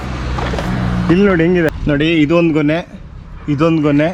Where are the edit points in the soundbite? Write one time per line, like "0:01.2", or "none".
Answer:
0:01.8